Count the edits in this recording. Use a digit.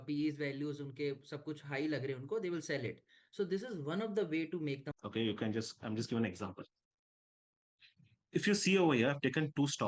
1